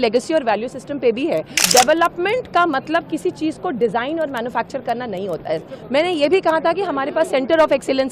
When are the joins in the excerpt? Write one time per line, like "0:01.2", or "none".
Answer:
0:01.6